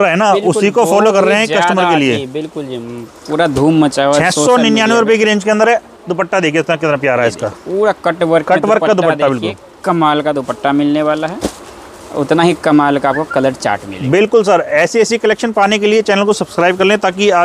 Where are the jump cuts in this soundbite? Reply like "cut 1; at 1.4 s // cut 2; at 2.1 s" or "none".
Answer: none